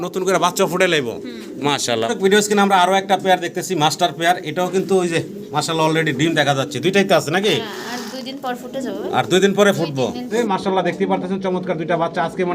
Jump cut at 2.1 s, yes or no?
yes